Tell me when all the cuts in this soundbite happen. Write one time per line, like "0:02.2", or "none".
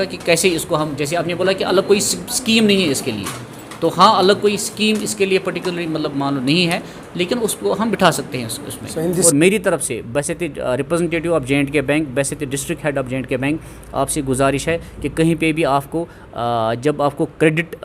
0:09.2